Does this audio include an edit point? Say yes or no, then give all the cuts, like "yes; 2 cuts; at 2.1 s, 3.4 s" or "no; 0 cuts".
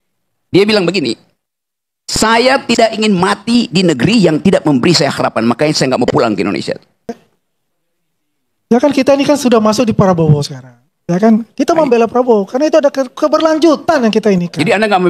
yes; 1 cut; at 7.0 s